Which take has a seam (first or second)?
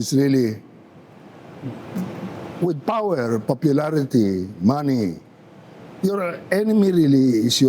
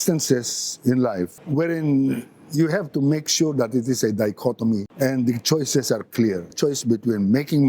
second